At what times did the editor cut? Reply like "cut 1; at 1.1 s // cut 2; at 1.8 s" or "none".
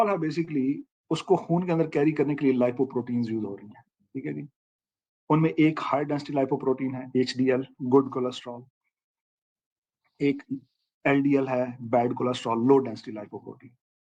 none